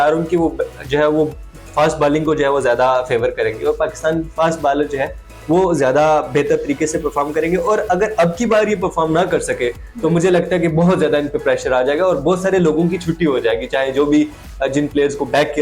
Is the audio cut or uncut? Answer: uncut